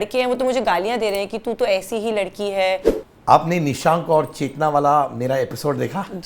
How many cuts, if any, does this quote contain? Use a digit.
1